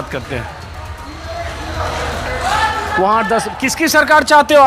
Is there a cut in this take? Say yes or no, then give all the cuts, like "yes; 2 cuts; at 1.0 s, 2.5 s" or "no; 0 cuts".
no; 0 cuts